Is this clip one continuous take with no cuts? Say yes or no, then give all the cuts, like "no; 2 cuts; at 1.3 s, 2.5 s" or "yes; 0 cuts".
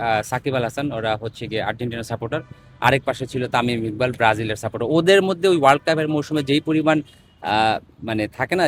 yes; 0 cuts